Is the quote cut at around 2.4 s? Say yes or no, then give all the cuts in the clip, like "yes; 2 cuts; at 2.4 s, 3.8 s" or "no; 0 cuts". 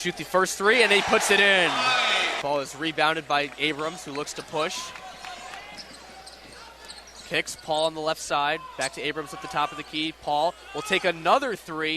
yes; 1 cut; at 2.4 s